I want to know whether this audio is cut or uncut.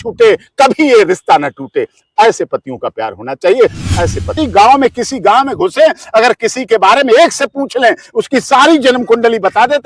cut